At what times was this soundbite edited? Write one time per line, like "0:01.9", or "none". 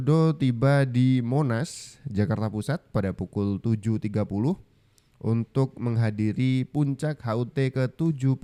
none